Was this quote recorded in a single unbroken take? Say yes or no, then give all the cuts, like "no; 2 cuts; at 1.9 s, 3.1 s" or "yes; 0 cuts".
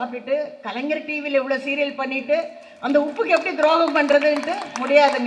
yes; 0 cuts